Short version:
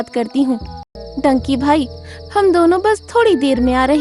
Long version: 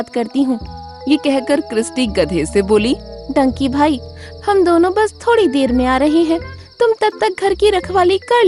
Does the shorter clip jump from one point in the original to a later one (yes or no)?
yes